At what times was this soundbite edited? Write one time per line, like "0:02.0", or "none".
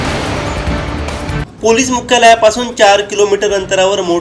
0:01.4